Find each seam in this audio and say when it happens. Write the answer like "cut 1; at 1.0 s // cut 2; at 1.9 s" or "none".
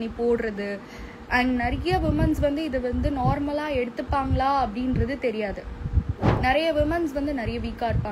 cut 1; at 6.3 s